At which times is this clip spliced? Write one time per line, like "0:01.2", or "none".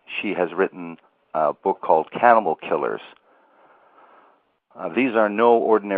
none